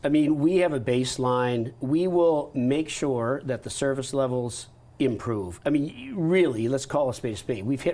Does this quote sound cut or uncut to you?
uncut